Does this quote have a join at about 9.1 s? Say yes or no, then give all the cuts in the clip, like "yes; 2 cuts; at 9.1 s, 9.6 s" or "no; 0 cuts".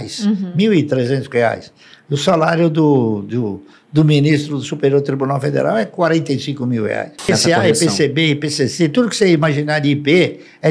no; 1 cut; at 7.3 s